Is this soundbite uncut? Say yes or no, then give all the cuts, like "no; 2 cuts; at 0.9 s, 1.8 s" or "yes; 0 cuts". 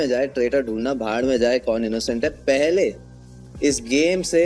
yes; 0 cuts